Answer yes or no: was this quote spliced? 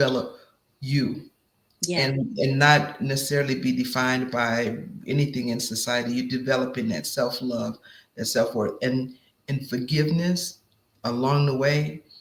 no